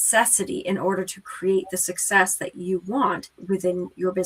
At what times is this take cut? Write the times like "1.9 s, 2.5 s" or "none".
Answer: none